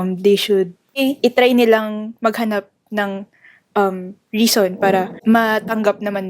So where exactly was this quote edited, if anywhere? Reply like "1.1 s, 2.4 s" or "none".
1.0 s, 5.1 s

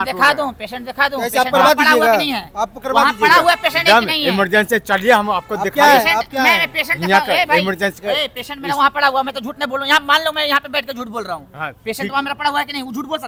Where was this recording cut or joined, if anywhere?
none

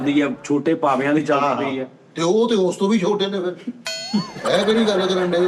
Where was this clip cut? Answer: none

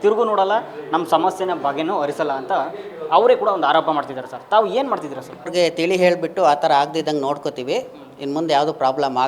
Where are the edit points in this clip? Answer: 5.5 s

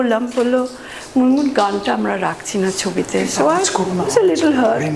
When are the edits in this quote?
none

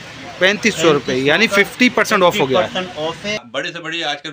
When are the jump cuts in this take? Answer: 3.4 s

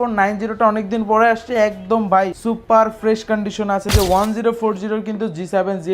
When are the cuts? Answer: 2.4 s, 3.9 s

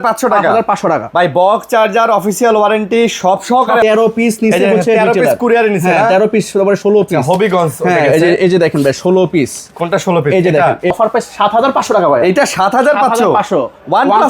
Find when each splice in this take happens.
3.8 s, 10.9 s

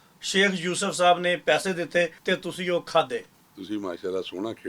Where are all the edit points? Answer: 2.2 s, 3.4 s

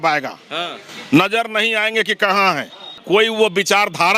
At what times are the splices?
3.0 s

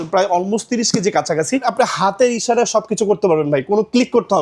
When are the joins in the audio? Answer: 1.6 s

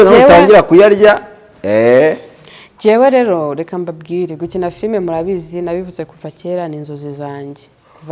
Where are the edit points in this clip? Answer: none

